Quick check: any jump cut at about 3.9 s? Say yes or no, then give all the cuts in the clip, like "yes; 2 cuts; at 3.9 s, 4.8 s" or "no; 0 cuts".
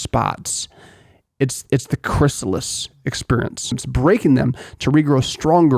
yes; 1 cut; at 3.9 s